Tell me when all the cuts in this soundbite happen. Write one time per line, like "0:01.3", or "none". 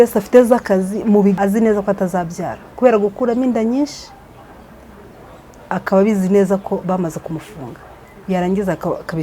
0:01.4